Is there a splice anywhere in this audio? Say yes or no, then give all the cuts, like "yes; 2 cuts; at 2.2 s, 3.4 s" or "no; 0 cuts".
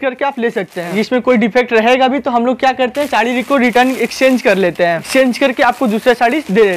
yes; 2 cuts; at 0.9 s, 5.1 s